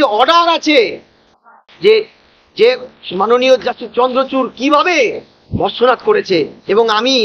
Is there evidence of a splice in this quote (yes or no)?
no